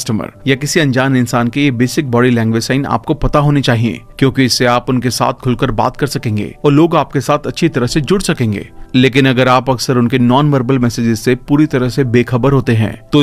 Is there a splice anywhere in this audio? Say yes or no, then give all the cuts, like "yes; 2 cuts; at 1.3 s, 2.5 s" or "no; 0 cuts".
no; 0 cuts